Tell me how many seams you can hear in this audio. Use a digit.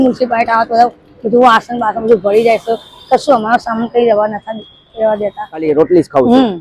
1